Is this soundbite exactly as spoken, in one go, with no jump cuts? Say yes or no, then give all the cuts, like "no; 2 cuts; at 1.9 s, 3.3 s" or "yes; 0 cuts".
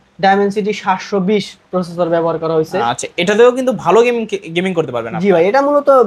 yes; 0 cuts